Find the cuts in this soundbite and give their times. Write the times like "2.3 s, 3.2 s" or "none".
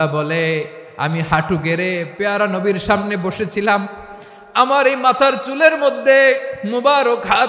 none